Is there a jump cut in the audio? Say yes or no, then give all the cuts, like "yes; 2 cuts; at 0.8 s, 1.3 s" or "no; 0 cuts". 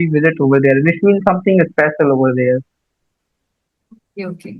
no; 0 cuts